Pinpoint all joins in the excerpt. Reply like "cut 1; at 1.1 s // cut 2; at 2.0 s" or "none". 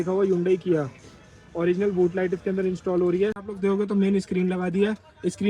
cut 1; at 3.4 s